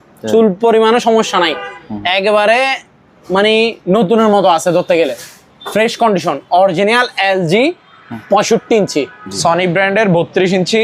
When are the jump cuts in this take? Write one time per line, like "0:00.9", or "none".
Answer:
0:09.2